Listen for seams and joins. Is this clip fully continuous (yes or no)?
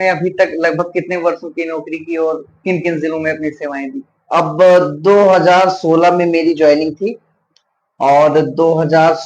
yes